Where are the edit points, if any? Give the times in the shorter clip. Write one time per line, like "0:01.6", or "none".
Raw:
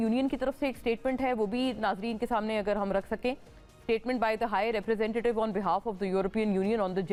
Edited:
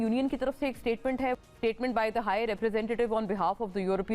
0:01.4